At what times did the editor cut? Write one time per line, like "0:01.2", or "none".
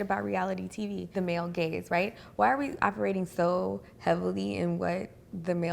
0:01.1